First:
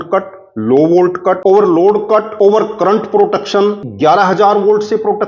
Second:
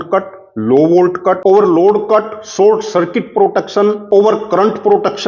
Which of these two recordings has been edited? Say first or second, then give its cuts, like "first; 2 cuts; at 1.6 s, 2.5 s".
first; 2 cuts; at 2.3 s, 3.8 s